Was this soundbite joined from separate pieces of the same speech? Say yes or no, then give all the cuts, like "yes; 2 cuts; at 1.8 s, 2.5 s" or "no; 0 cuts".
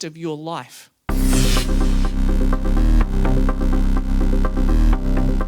yes; 1 cut; at 1.1 s